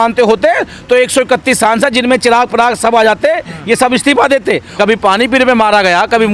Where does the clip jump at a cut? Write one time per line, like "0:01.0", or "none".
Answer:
0:04.7